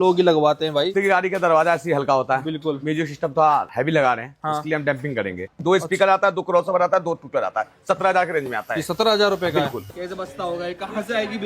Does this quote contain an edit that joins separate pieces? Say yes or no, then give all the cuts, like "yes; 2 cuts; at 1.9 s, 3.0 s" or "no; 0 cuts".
yes; 3 cuts; at 0.9 s, 5.5 s, 9.8 s